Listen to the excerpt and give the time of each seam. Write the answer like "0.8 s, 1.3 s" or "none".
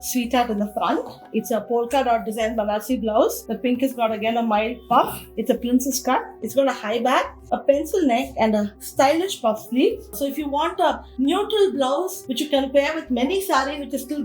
1.2 s, 3.4 s, 6.4 s, 10.1 s

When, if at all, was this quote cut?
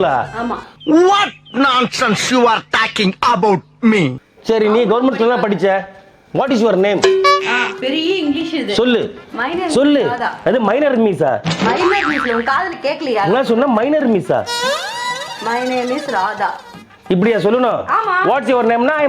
4.2 s

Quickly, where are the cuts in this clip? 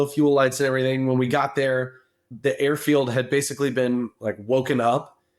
2.3 s

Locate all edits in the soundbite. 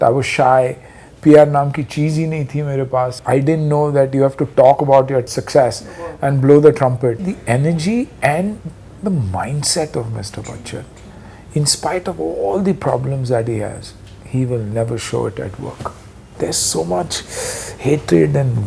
3.2 s, 5.3 s, 7.3 s, 8.9 s, 16.4 s

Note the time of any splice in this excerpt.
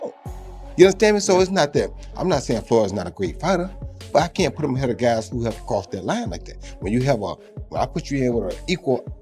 none

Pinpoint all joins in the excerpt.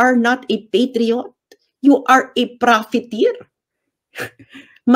none

